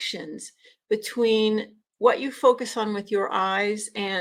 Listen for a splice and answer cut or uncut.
uncut